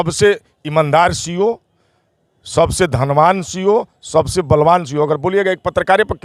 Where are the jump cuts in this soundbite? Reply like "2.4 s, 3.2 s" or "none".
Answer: none